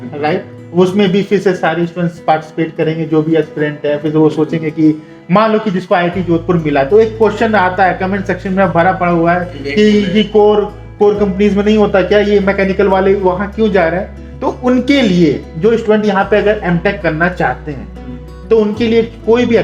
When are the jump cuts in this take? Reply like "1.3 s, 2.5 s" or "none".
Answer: none